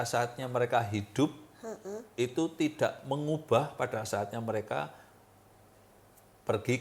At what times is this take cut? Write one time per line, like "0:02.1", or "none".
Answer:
none